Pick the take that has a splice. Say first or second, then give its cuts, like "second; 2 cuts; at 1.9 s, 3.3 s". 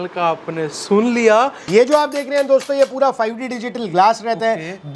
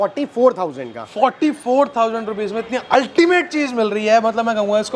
first; 1 cut; at 1.6 s